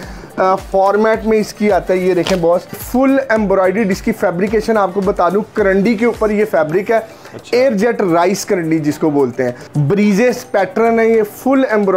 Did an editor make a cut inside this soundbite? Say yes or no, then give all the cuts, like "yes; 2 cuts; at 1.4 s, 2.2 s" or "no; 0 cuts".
yes; 2 cuts; at 2.8 s, 9.7 s